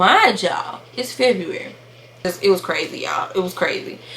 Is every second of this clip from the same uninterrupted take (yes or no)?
no